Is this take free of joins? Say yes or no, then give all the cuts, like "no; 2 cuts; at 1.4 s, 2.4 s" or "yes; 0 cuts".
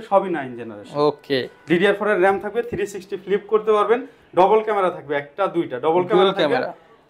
yes; 0 cuts